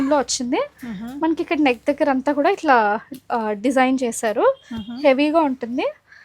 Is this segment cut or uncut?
uncut